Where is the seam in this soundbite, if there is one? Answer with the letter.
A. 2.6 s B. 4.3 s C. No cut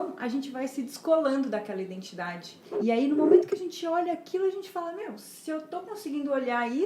A